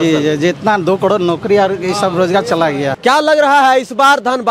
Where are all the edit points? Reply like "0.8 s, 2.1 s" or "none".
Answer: 2.9 s